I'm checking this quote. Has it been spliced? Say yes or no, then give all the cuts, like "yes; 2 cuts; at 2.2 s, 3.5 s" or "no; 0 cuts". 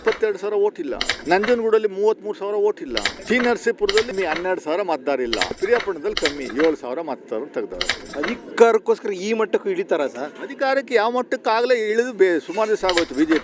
yes; 5 cuts; at 1.1 s, 3.1 s, 4.1 s, 5.6 s, 8.1 s